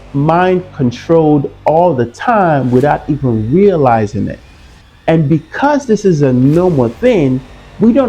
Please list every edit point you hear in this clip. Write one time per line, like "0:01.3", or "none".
none